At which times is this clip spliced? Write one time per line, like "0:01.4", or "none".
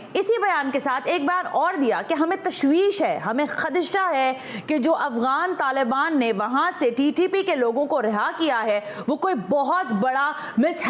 none